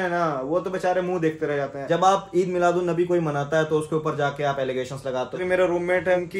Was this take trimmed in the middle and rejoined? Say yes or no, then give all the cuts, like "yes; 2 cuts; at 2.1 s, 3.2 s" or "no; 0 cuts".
yes; 2 cuts; at 1.8 s, 5.4 s